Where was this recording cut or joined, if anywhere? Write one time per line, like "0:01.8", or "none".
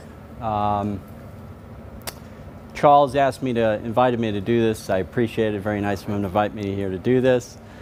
none